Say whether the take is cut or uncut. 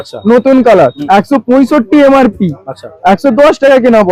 cut